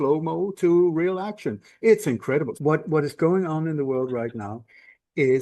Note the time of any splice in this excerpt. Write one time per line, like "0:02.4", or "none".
0:02.5